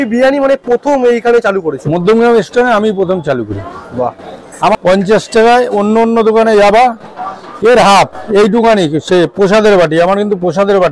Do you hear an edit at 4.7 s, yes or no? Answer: yes